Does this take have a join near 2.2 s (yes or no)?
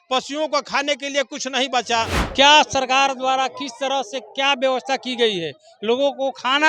yes